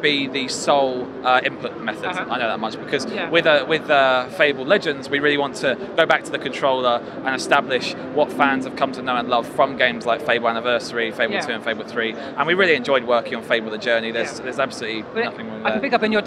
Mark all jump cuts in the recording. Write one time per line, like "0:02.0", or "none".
none